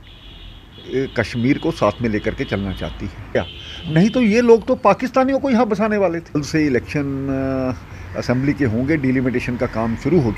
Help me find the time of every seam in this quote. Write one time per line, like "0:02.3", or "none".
0:03.4
0:06.4